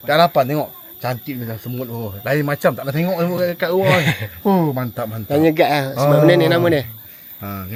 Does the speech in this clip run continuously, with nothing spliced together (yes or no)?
yes